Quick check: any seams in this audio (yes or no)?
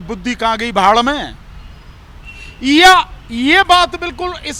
no